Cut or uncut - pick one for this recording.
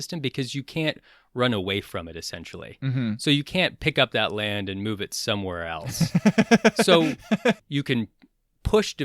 cut